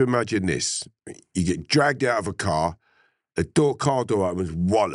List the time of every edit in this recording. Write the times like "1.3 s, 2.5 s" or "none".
none